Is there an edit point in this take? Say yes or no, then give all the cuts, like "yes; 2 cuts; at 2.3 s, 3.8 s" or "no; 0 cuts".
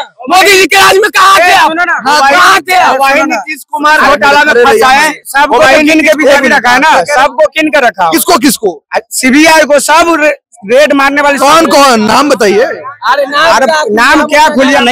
no; 0 cuts